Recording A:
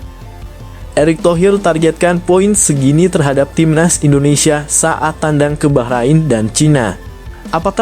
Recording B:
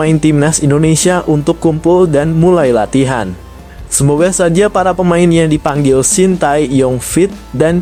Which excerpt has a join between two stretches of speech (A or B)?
A